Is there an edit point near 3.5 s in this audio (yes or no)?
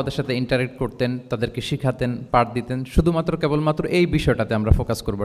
no